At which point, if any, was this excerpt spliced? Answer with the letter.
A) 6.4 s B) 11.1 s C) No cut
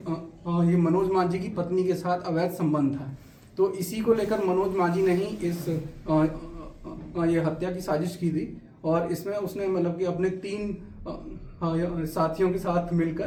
C